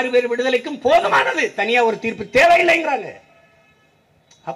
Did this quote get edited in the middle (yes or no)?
no